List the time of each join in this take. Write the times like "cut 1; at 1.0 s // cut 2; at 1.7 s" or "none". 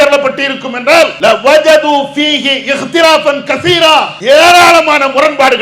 cut 1; at 1.1 s // cut 2; at 4.1 s